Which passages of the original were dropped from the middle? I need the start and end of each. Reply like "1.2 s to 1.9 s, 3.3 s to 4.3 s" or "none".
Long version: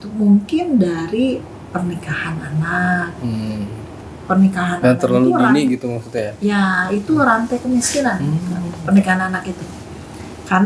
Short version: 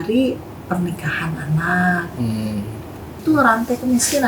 4.2 s to 7.0 s